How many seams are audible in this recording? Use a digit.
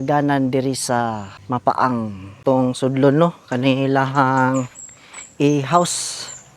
2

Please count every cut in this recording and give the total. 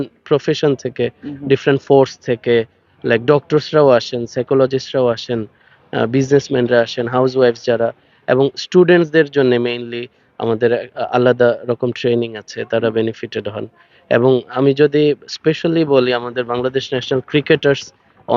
0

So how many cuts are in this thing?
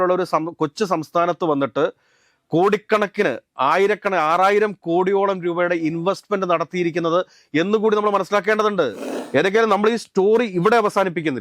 1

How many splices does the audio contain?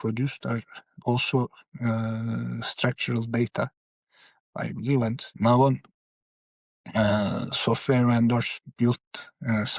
2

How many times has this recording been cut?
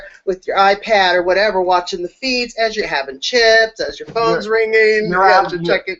0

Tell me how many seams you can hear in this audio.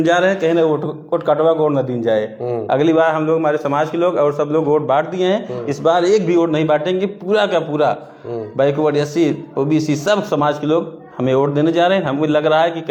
0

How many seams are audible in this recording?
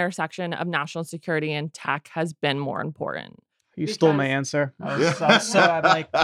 0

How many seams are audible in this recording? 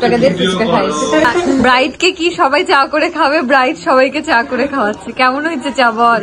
1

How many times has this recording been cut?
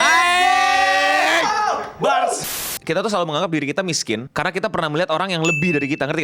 2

